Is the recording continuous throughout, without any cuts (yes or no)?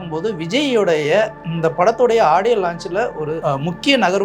no